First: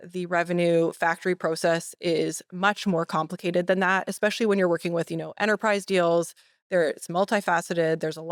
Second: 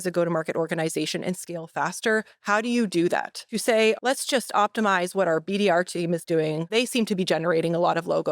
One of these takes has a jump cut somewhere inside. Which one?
second; 2 cuts; at 3.9 s, 6.7 s

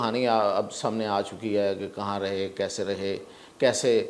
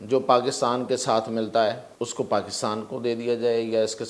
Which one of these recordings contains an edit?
second; 1 cut; at 1.9 s

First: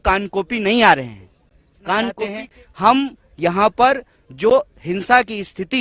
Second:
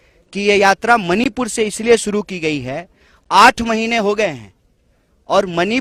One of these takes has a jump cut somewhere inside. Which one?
first; 1 cut; at 2.4 s

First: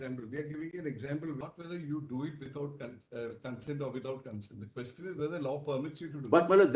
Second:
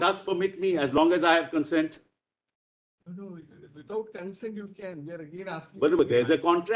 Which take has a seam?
first; 1 cut; at 1.4 s

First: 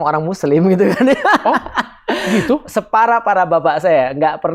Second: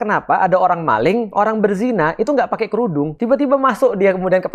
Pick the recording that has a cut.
second; 2 cuts; at 1.3 s, 3.1 s

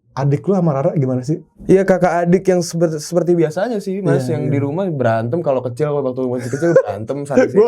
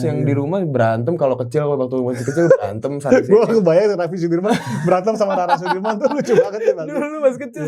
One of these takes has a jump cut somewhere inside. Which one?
first; 1 cut; at 1.5 s

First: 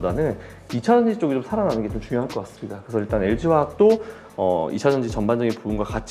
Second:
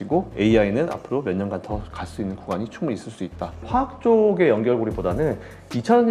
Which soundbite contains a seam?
second; 1 cut; at 3.6 s

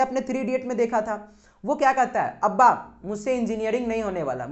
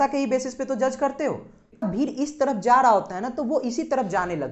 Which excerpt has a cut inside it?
second; 1 cut; at 1.8 s

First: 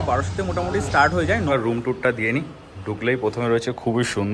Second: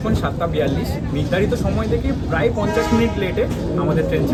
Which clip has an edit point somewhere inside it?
first; 1 cut; at 1.5 s

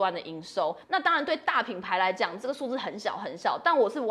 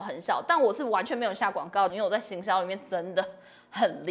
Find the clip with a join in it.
second; 1 cut; at 1.9 s

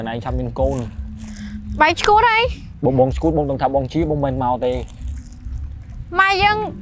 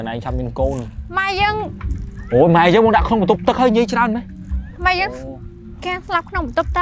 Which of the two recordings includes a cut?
second; 1 cut; at 1.0 s

